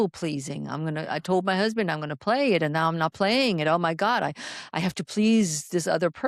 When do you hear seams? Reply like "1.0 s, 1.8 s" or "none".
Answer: none